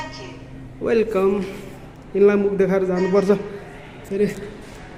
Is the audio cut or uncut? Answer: uncut